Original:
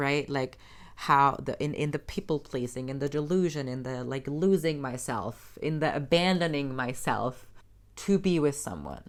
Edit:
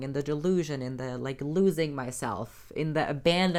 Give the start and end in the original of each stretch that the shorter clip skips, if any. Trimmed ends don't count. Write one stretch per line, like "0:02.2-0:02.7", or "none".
none